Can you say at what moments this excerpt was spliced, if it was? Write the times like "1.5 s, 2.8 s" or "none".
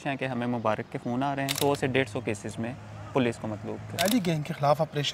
1.6 s, 4.1 s